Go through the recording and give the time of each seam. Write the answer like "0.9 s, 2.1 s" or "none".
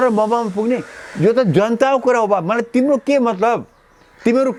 none

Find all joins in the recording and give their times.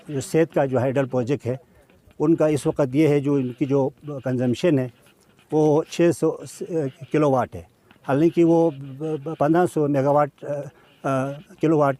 none

